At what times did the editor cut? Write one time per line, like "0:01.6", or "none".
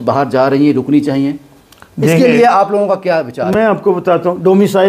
none

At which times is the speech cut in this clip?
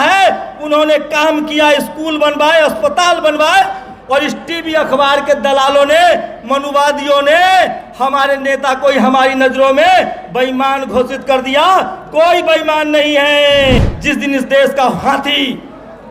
0:13.9

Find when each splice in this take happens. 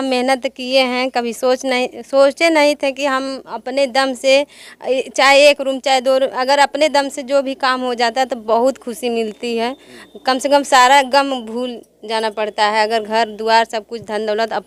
none

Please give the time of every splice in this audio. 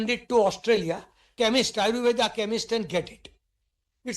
0:01.3

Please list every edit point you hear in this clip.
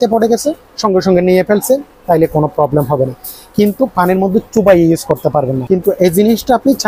0:05.6

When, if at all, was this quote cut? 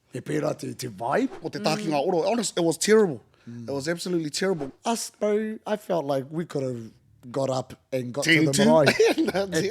0:01.4
0:04.6

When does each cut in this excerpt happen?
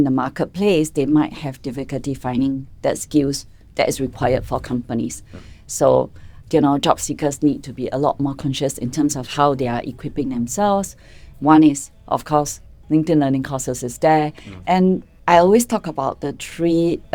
0:15.1

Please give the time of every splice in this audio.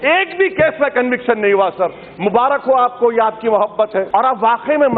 0:04.1

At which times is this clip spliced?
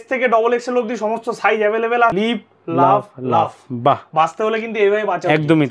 0:02.1

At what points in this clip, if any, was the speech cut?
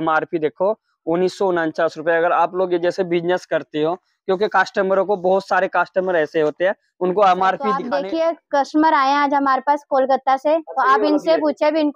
0:07.9

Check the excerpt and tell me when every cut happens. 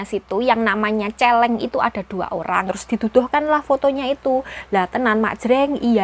0:02.8

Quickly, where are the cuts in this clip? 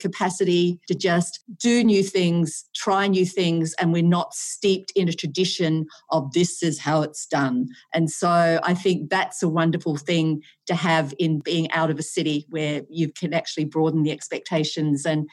0:00.9

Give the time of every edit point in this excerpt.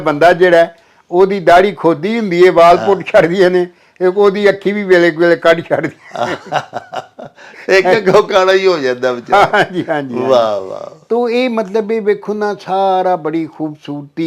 none

